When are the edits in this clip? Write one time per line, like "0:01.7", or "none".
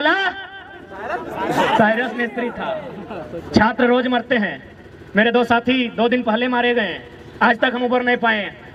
none